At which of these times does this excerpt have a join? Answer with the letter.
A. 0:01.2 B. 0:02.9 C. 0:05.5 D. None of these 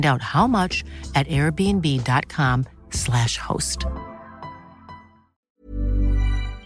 C